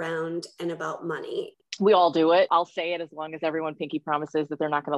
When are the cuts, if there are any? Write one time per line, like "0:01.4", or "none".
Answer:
0:01.5
0:02.5